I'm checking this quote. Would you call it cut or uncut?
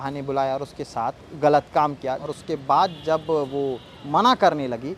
cut